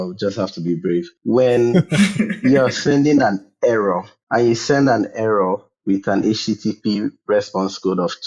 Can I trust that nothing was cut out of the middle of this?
no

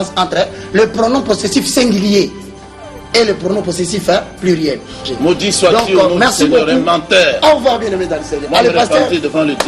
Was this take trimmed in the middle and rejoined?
yes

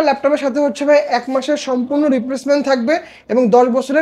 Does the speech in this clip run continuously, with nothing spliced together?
yes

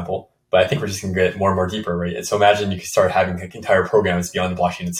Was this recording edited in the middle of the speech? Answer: no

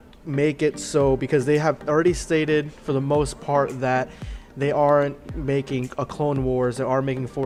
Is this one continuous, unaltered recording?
yes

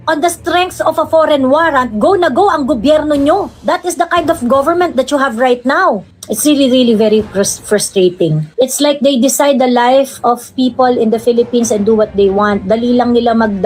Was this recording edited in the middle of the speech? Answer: no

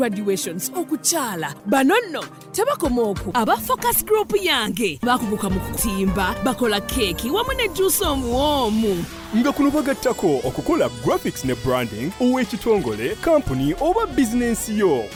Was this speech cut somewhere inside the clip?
no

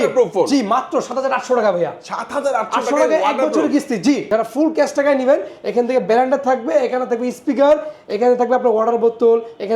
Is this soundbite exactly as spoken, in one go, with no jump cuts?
no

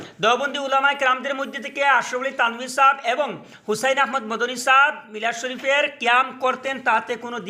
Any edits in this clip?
no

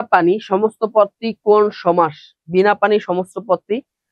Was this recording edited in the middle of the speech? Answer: no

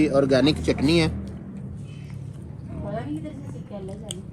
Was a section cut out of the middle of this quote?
no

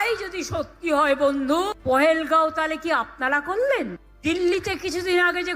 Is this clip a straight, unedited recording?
no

